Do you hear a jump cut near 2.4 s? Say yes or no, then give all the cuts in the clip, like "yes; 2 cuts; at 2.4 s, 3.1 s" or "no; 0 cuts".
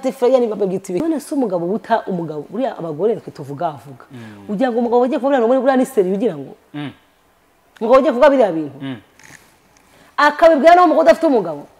no; 1 cut; at 1.0 s